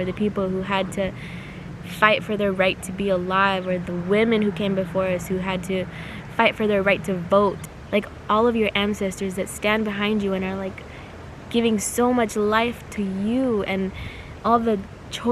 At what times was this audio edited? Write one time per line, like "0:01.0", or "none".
0:07.7